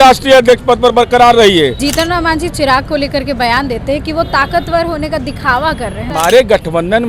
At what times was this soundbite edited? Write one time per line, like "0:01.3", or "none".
0:01.8
0:06.1